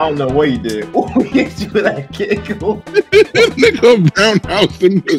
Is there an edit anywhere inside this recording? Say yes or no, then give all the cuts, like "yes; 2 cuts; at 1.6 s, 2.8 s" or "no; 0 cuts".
no; 0 cuts